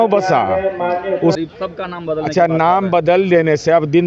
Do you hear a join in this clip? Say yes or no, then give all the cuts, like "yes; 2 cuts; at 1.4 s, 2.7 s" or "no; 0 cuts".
yes; 1 cut; at 1.4 s